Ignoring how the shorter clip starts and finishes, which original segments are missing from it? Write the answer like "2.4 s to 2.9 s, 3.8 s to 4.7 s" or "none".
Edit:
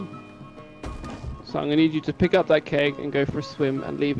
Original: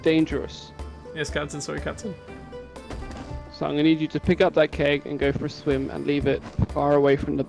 none